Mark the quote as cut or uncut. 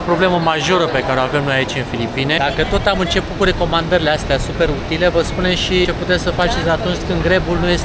cut